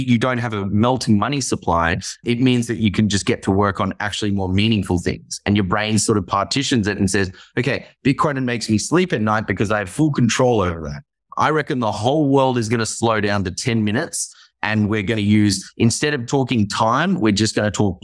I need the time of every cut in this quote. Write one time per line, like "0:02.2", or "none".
0:02.2
0:11.2